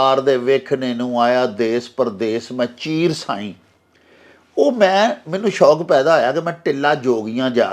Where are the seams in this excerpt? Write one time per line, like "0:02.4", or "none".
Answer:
none